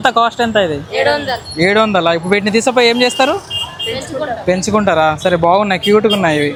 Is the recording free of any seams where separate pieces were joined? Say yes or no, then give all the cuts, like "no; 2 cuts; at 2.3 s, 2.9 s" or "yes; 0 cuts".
yes; 0 cuts